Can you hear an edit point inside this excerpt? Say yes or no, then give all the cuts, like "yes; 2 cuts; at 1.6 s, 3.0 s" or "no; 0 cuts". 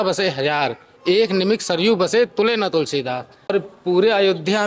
yes; 1 cut; at 3.5 s